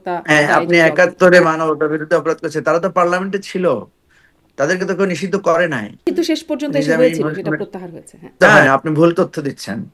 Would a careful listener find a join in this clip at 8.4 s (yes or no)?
yes